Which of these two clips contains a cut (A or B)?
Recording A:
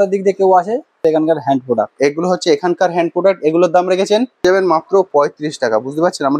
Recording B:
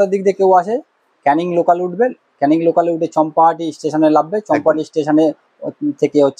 A